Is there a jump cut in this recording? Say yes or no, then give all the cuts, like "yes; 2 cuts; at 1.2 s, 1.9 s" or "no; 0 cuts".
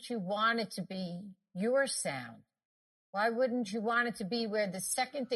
no; 0 cuts